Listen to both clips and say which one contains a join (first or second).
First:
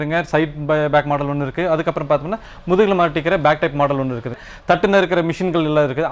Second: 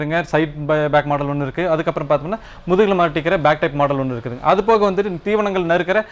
first